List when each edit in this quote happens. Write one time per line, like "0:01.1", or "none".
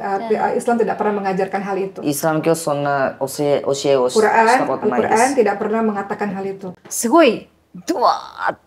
0:06.8